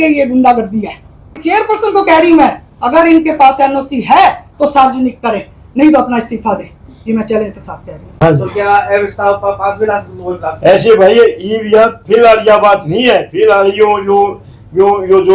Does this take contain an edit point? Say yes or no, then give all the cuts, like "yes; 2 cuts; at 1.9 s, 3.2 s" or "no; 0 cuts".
yes; 2 cuts; at 1.4 s, 8.1 s